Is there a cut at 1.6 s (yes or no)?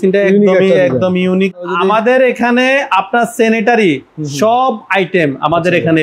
yes